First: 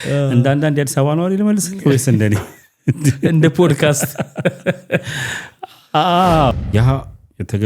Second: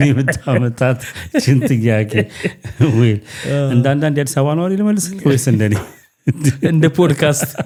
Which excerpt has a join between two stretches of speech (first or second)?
first